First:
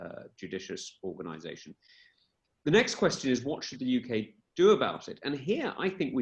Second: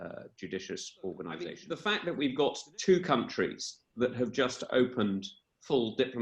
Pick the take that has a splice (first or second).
second